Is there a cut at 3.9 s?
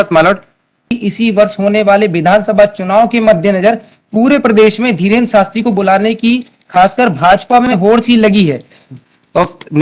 no; 2 cuts; at 0.9 s, 8.9 s

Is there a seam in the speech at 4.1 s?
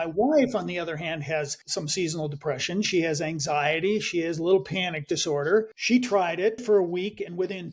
no; 3 cuts; at 1.6 s, 5.8 s, 6.6 s

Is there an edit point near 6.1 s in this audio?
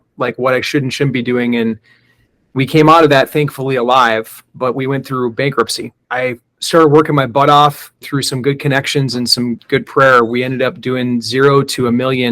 yes; 3 cuts; at 6.1 s, 8.0 s, 9.6 s

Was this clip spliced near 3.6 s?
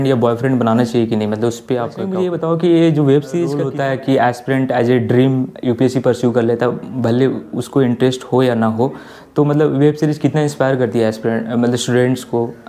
yes; 2 cuts; at 2.1 s, 3.6 s

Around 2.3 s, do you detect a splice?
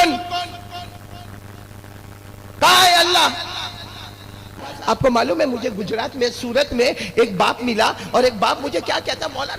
no; 1 cut; at 4.7 s

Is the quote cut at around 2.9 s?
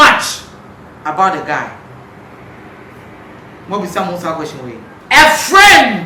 no; 1 cut; at 4.9 s

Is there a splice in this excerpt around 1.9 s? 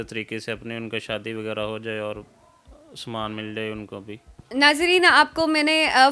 no; 0 cuts

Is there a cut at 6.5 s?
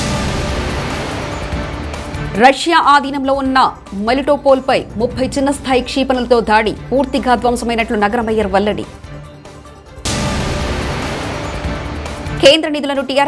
no; 1 cut; at 2.1 s

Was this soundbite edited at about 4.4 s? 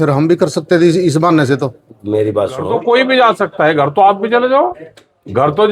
no; 1 cut; at 2.7 s

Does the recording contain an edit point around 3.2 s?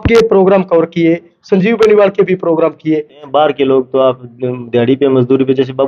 yes; 1 cut; at 3.2 s

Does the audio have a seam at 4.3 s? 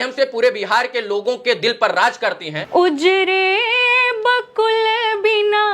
no; 1 cut; at 2.5 s

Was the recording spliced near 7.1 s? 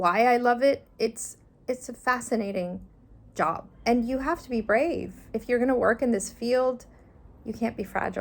no; 2 cuts; at 3.7 s, 5.2 s

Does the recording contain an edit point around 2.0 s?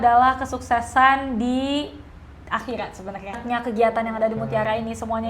no; 1 cut; at 3.4 s

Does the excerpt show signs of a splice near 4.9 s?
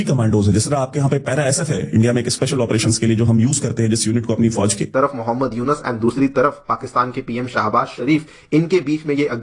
yes; 1 cut; at 4.9 s

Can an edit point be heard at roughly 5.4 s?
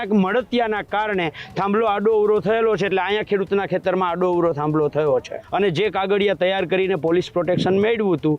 yes; 1 cut; at 5.4 s

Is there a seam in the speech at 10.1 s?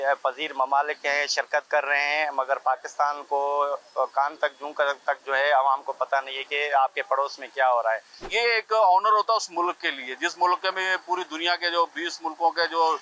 no; 1 cut; at 8.3 s

